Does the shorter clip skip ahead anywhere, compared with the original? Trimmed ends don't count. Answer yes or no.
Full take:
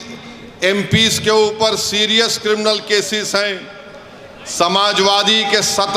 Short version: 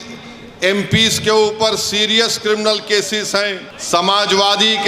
yes